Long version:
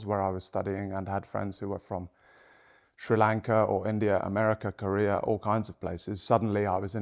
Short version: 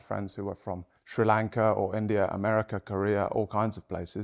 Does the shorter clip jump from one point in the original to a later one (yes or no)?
yes